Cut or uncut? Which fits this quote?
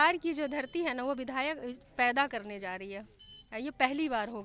uncut